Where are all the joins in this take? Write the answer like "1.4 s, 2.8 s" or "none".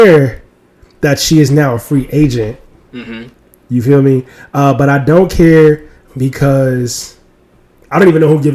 none